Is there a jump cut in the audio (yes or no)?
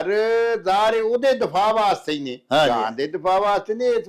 no